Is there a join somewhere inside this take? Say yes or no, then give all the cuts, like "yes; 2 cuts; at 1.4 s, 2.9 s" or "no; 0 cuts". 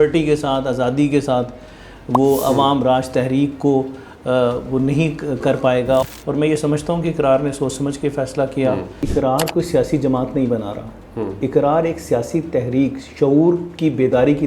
yes; 2 cuts; at 6.2 s, 9.1 s